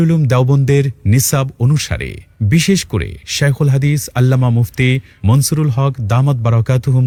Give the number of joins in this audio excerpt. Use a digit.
0